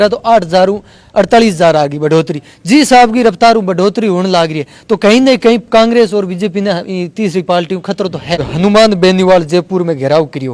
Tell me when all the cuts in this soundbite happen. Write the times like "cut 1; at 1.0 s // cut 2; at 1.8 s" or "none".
cut 1; at 8.5 s

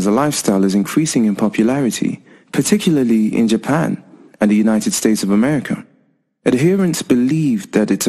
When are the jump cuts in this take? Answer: cut 1; at 1.7 s

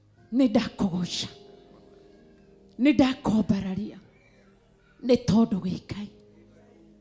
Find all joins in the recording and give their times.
none

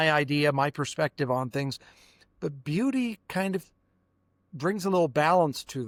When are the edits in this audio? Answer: none

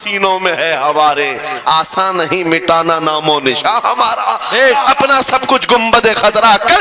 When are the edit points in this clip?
cut 1; at 4.8 s

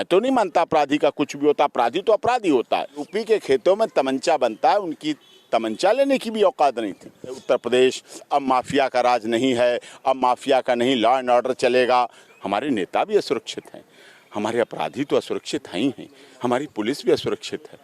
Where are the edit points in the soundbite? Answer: cut 1; at 3.0 s // cut 2; at 7.4 s // cut 3; at 12.2 s

